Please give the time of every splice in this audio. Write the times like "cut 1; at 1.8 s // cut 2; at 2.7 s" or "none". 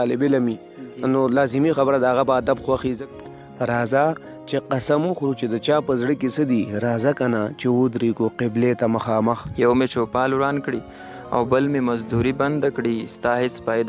cut 1; at 3.0 s // cut 2; at 9.5 s